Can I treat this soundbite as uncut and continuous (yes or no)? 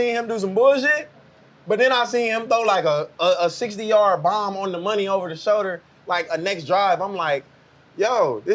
yes